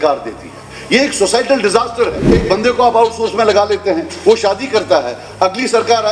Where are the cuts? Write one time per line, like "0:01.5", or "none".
0:02.3